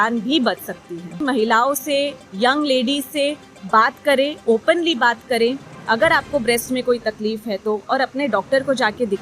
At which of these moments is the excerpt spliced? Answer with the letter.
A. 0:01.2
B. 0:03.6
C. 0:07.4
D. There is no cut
A